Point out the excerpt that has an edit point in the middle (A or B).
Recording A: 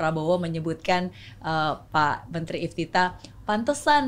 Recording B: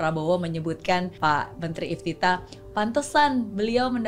B